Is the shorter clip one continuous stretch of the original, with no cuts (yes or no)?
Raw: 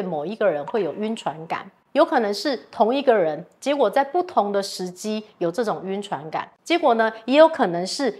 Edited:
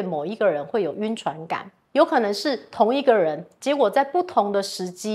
yes